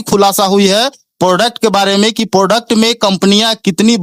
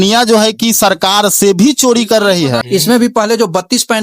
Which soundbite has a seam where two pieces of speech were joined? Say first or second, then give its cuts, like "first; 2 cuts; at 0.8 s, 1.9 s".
second; 1 cut; at 2.6 s